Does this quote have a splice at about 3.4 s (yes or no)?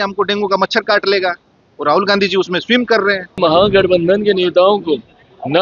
yes